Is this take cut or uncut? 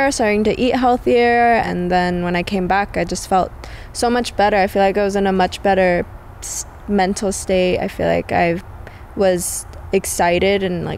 cut